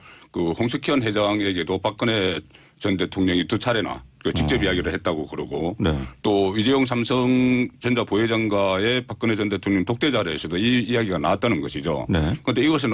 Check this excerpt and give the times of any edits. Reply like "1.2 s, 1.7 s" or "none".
none